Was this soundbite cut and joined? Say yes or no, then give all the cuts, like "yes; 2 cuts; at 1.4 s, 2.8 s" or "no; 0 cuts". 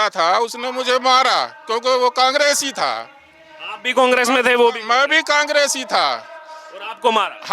no; 0 cuts